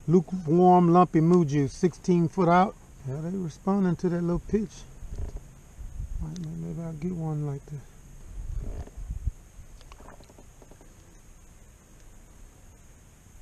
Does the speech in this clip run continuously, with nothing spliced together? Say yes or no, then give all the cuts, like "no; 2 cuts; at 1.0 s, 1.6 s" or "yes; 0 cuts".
no; 2 cuts; at 3.2 s, 8.2 s